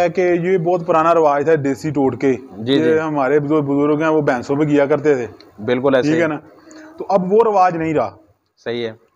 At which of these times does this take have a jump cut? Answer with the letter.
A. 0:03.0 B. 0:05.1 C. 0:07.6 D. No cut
D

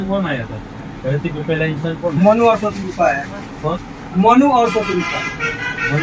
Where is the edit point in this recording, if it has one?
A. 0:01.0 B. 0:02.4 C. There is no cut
C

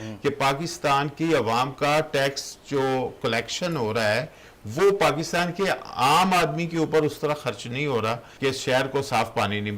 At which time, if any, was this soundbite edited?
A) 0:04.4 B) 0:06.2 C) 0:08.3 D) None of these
C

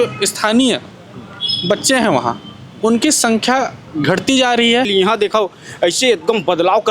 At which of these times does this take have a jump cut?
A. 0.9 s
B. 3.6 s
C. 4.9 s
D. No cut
C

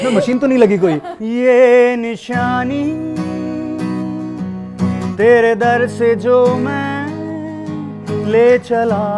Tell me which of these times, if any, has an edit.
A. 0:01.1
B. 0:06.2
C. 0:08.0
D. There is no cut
A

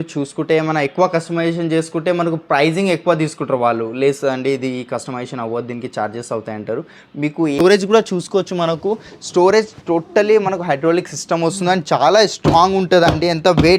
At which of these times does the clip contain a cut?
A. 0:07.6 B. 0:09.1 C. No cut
A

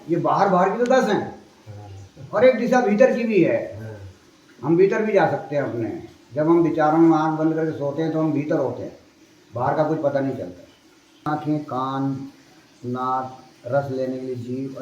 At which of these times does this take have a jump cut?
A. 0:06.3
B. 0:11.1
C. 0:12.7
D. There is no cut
B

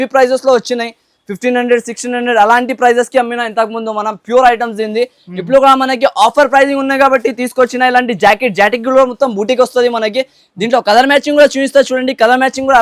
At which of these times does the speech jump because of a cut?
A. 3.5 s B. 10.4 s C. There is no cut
C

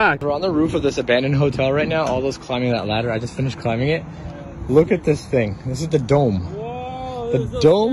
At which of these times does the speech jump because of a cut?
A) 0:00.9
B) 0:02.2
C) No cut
C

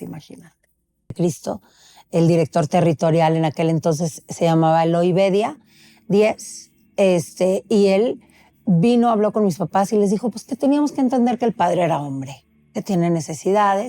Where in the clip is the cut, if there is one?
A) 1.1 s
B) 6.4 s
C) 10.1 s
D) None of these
A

